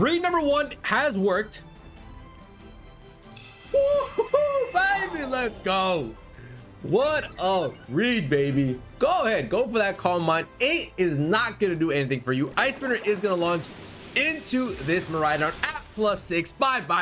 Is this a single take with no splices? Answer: yes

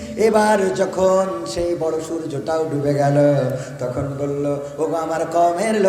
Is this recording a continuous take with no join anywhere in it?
yes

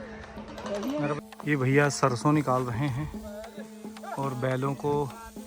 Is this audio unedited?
no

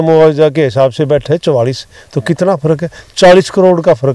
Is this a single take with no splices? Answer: yes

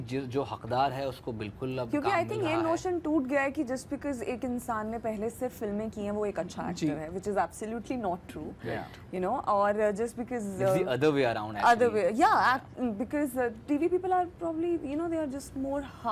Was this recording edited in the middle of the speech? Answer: no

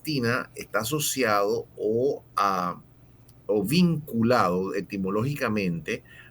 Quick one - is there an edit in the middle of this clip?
no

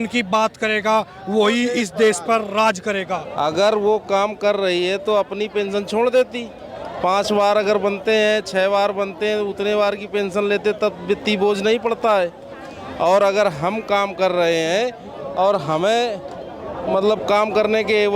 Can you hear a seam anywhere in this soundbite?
yes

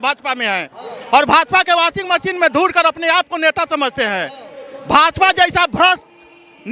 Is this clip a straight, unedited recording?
yes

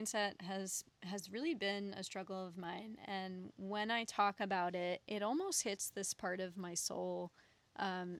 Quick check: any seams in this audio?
no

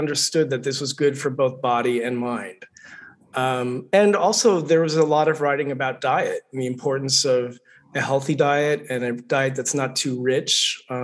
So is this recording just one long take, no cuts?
yes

